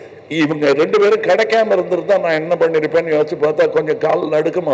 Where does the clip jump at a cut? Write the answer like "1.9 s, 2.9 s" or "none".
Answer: none

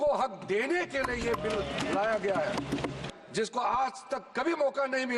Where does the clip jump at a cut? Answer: 3.1 s

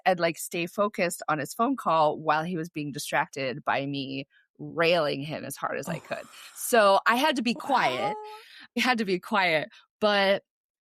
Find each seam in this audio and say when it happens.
none

